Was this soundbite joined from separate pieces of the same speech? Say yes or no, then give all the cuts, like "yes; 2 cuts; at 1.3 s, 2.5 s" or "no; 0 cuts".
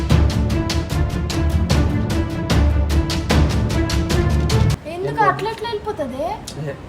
yes; 1 cut; at 4.8 s